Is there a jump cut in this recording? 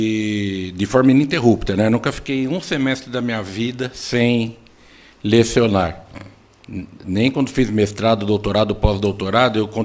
no; 0 cuts

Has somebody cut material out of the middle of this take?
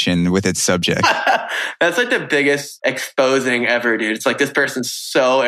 yes; 1 cut; at 2.7 s

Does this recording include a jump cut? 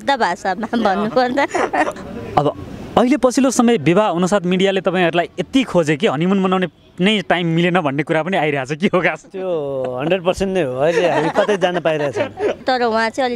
yes; 2 cuts; at 1.9 s, 12.6 s

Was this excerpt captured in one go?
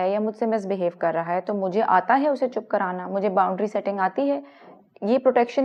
yes; 0 cuts

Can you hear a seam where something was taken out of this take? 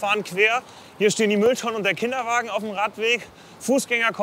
no; 0 cuts

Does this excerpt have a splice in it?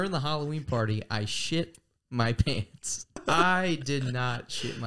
yes; 1 cut; at 3.2 s

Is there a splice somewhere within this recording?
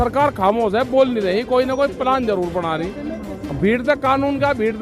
yes; 1 cut; at 3.4 s

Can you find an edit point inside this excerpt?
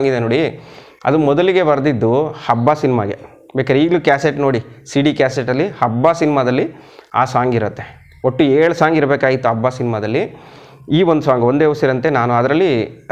no; 0 cuts

